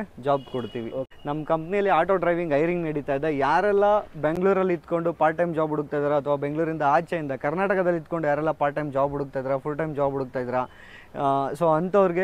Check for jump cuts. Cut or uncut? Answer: cut